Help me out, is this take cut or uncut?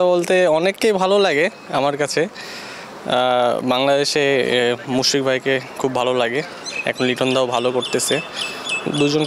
uncut